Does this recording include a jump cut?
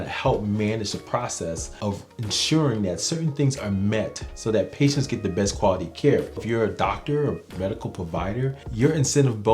yes; 2 cuts; at 6.4 s, 8.6 s

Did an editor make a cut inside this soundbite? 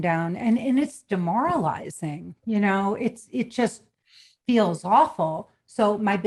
no; 0 cuts

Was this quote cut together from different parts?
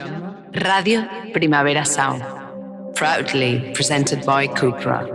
no; 0 cuts

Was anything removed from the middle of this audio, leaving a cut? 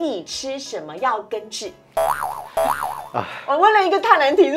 no; 0 cuts

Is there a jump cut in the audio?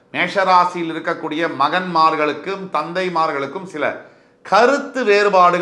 no; 0 cuts

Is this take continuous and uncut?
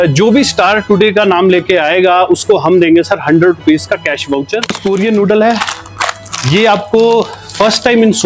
no; 1 cut; at 4.7 s

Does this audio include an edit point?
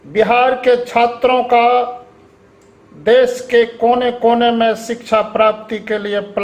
no; 0 cuts

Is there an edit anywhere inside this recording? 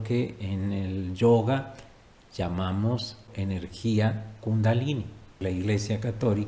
yes; 2 cuts; at 3.3 s, 5.3 s

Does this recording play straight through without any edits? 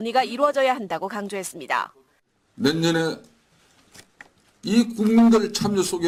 yes; 0 cuts

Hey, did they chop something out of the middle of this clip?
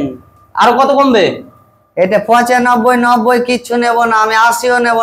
no; 0 cuts

